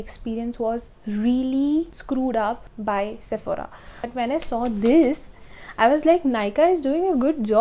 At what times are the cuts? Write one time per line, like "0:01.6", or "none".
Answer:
0:00.9
0:02.0
0:02.7
0:04.1